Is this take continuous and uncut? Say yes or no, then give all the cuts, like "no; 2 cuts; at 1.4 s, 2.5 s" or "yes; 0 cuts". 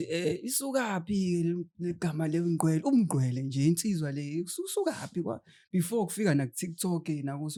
yes; 0 cuts